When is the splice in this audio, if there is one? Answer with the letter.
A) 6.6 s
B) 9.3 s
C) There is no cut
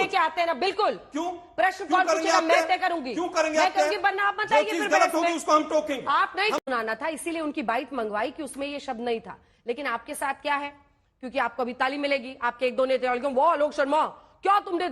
A